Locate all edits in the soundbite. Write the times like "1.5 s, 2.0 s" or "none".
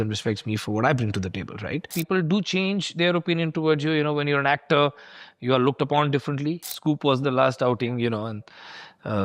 2.0 s, 6.6 s